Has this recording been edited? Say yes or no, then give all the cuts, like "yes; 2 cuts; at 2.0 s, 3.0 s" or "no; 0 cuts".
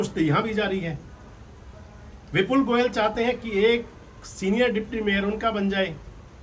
no; 0 cuts